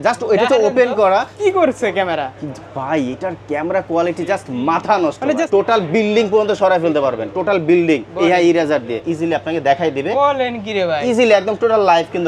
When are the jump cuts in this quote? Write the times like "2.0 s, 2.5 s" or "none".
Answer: 1.3 s, 5.4 s, 9.0 s

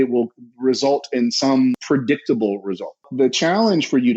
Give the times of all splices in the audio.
1.8 s, 3.1 s

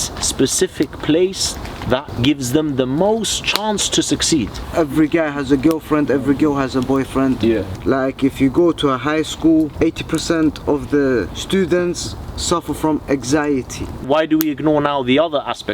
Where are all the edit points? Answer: 2.1 s, 4.6 s, 7.7 s, 9.7 s, 11.4 s, 14.0 s

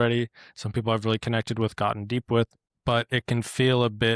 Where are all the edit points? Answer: 2.6 s

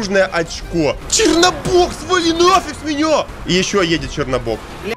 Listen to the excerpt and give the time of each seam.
1.0 s, 3.4 s

